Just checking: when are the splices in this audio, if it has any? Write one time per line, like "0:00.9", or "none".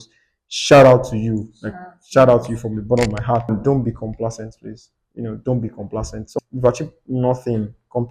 0:03.5
0:06.3